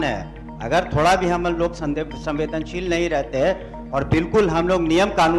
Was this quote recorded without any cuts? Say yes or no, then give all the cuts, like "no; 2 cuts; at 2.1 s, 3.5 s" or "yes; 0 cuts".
yes; 0 cuts